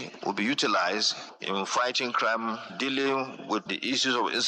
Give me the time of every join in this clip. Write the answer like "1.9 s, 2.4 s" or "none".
none

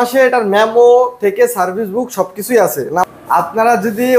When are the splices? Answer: 3.1 s

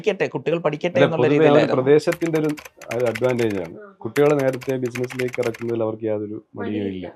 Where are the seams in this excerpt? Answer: none

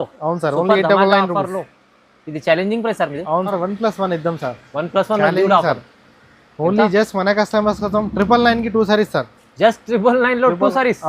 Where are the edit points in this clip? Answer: 3.5 s

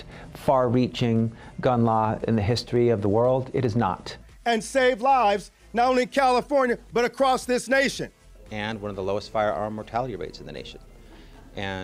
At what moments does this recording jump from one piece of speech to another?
none

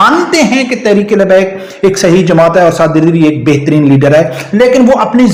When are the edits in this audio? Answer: none

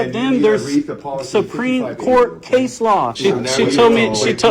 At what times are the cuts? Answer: 3.1 s

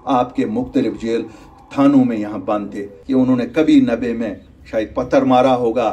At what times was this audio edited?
2.9 s

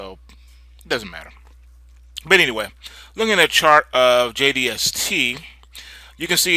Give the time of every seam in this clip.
1.6 s

